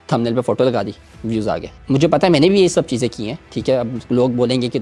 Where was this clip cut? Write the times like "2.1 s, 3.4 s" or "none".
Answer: none